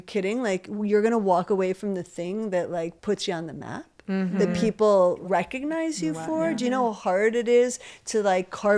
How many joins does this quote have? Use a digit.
2